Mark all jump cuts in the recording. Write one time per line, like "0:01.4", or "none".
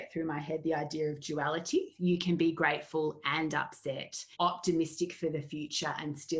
0:01.9
0:04.3